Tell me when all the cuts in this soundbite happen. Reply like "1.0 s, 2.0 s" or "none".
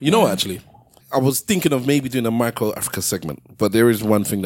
1.0 s